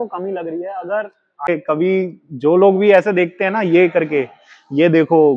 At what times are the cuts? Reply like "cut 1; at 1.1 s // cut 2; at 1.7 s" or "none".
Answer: cut 1; at 1.5 s